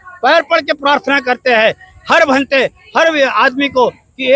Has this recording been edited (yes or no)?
no